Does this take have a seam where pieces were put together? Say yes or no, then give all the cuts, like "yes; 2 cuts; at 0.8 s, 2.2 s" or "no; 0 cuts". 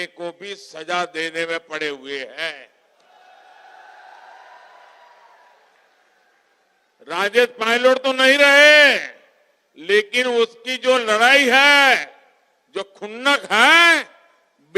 no; 0 cuts